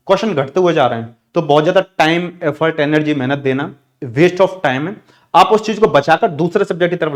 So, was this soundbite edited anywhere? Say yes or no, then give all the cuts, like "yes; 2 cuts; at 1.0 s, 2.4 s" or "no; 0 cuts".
no; 0 cuts